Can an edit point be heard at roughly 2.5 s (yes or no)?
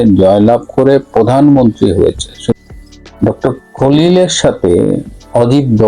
yes